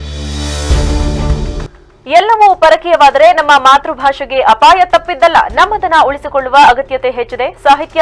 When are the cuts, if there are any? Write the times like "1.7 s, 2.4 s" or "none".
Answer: 1.7 s